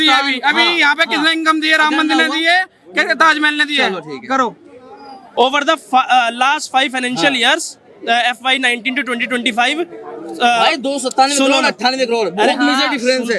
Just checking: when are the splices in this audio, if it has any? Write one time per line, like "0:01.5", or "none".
0:05.2